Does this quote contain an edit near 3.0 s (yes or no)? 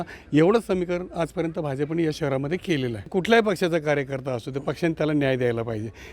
yes